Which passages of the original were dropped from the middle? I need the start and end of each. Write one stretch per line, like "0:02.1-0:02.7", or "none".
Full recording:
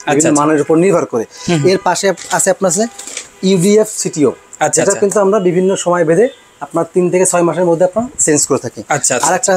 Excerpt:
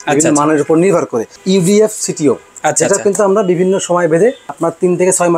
0:01.3-0:03.3
0:06.4-0:06.6